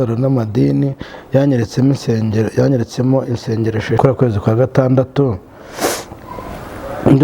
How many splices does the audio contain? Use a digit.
1